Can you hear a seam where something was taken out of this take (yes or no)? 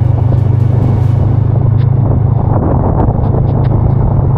no